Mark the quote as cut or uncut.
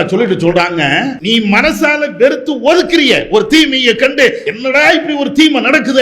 cut